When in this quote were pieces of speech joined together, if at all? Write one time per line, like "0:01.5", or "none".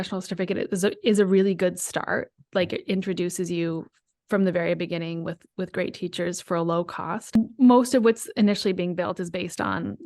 0:07.4

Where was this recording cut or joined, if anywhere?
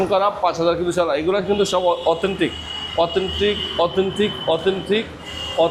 none

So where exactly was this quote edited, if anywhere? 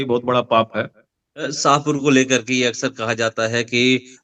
0:01.5

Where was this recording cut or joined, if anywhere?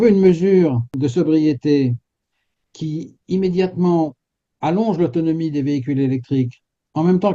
0:01.0

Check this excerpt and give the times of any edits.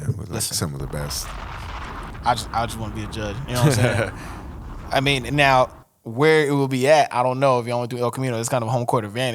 0:01.9

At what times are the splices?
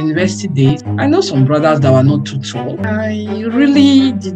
0:00.7
0:02.8

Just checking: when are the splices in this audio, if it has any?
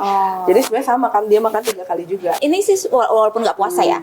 0:02.4

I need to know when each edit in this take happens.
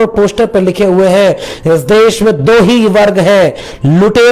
none

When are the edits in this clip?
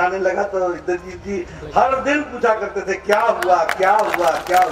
none

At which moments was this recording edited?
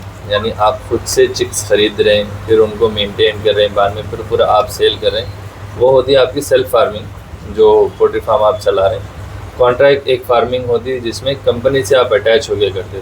none

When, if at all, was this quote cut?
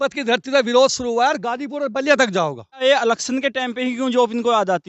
0:02.8

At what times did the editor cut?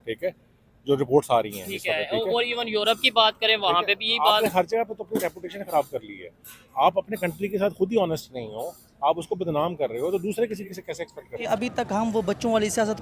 0:11.5

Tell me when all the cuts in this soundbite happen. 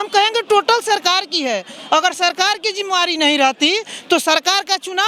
none

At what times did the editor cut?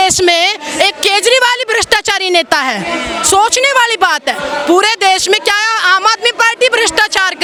none

